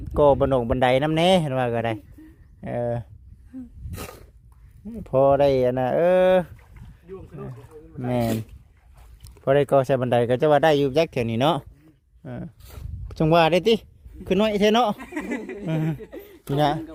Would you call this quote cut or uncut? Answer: uncut